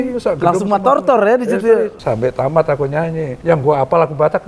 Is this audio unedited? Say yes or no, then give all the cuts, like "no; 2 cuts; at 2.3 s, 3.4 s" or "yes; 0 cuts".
no; 2 cuts; at 2.0 s, 3.3 s